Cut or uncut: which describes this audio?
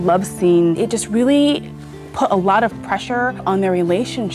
cut